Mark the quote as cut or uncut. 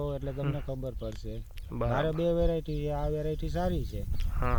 uncut